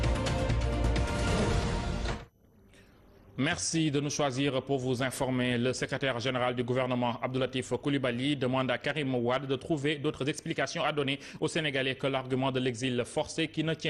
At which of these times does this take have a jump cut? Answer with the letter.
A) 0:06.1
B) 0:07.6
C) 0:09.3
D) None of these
C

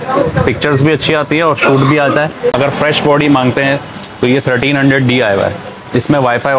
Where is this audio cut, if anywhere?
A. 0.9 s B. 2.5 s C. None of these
B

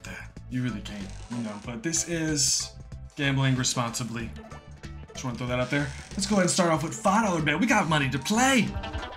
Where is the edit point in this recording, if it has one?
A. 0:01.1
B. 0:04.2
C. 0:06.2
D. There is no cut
D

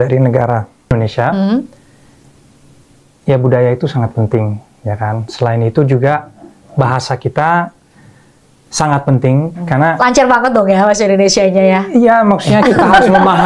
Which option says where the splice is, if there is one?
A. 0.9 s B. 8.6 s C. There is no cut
A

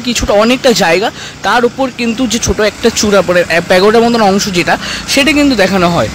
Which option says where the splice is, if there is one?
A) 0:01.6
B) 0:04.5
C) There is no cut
C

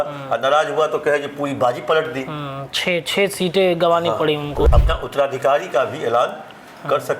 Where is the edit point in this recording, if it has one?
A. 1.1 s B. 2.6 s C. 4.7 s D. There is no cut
C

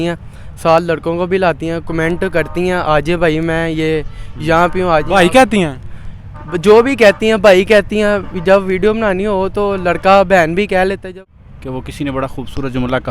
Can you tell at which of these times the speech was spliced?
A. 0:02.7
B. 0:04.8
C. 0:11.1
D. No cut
C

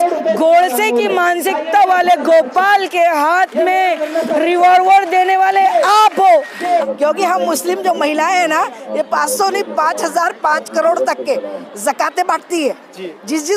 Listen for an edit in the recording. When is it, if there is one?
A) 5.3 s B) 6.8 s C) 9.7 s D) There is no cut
B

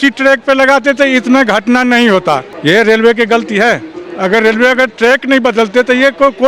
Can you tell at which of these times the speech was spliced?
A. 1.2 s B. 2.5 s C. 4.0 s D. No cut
B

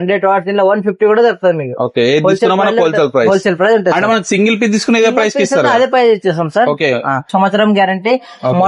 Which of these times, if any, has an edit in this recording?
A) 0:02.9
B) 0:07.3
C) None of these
B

